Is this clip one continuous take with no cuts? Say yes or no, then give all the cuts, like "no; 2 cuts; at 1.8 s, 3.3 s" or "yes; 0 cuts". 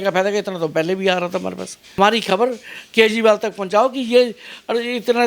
no; 1 cut; at 2.0 s